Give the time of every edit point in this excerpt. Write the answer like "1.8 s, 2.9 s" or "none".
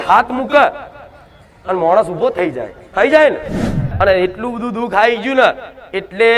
3.8 s